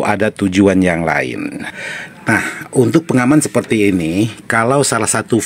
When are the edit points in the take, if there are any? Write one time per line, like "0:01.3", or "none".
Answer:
0:01.7